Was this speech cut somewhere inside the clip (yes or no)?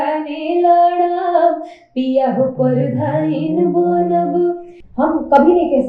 yes